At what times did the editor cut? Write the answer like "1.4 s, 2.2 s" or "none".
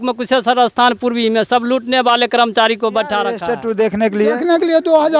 3.5 s